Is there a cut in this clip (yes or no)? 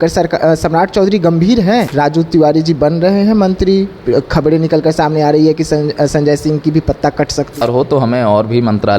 yes